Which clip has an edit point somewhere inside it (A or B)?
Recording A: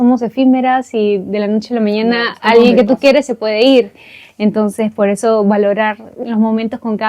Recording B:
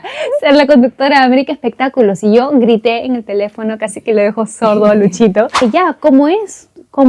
B